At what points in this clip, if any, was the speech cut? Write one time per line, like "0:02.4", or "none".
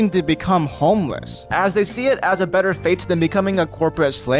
none